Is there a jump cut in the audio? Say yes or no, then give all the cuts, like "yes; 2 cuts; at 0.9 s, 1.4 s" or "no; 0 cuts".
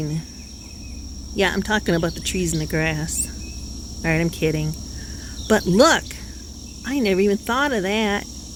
no; 0 cuts